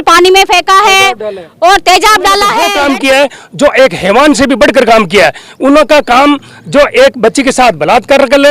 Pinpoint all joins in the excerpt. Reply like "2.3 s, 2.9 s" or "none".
2.6 s